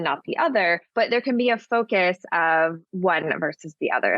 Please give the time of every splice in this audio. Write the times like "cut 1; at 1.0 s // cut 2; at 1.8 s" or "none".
cut 1; at 0.9 s // cut 2; at 2.9 s